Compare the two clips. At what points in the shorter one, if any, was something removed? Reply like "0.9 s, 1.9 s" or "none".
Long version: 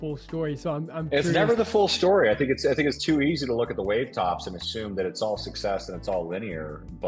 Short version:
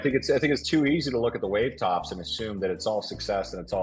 none